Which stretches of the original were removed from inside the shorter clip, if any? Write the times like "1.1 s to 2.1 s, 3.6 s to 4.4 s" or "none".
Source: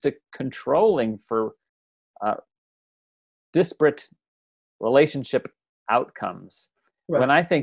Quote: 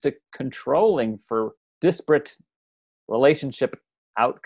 1.6 s to 3.4 s